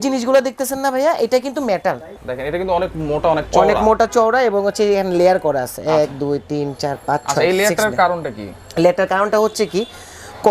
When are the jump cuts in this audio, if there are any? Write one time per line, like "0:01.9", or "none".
0:02.1

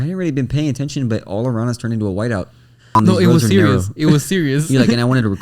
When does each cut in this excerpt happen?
0:02.9

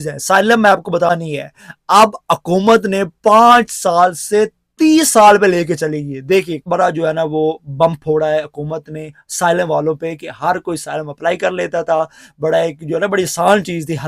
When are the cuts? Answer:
0:01.1
0:06.7

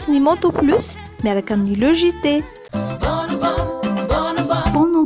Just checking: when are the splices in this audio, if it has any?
none

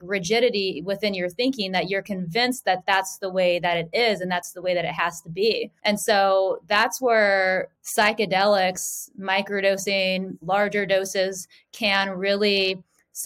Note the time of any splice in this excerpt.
0:05.7
0:07.8

